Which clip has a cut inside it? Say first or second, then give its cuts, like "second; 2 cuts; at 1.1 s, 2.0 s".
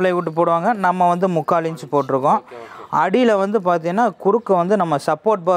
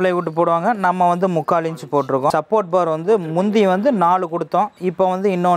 second; 1 cut; at 2.3 s